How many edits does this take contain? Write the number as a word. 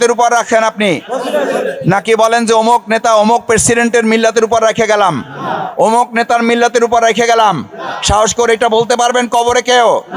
zero